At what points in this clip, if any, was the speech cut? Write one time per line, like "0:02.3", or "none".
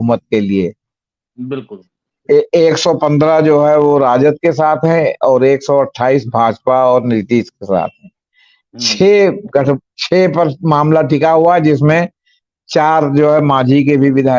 none

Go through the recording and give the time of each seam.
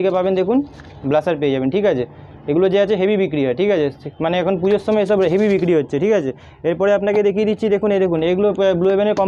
none

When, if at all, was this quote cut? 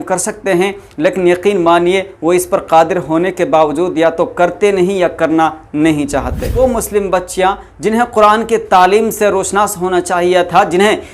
0:06.6

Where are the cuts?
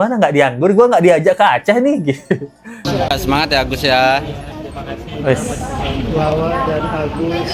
none

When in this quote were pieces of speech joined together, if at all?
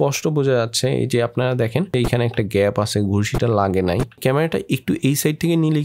none

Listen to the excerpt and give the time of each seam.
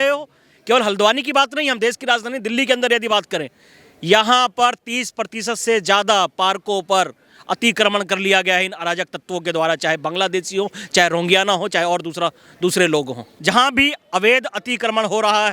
0:13.3

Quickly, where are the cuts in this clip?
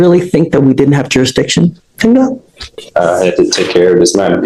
none

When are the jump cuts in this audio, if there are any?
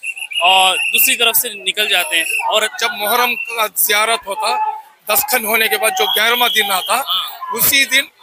0:02.7

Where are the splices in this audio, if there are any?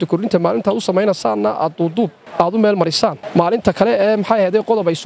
0:02.2
0:03.2

